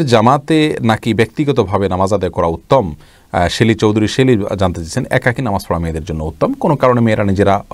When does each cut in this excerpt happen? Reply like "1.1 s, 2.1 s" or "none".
none